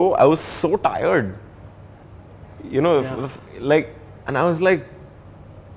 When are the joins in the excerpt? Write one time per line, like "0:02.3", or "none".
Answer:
none